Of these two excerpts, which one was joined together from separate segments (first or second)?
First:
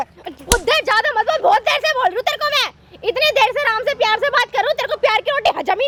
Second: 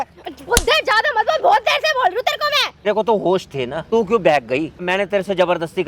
second